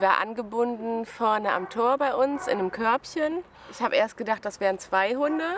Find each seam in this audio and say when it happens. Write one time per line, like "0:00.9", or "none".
0:03.6